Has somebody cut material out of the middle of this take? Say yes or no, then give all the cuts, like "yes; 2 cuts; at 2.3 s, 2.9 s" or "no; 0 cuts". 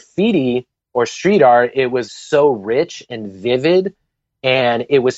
yes; 1 cut; at 2.1 s